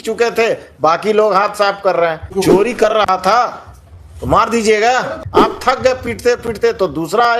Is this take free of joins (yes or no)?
no